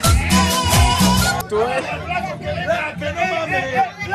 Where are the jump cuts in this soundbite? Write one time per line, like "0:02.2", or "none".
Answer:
0:01.4